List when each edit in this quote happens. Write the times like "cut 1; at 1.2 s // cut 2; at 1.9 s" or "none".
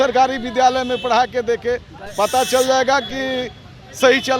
none